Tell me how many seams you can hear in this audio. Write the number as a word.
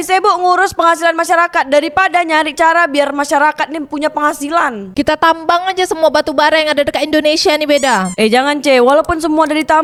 zero